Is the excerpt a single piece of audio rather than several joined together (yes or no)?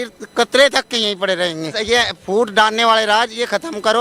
no